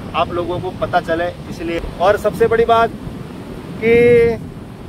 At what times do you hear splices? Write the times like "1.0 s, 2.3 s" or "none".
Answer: 1.8 s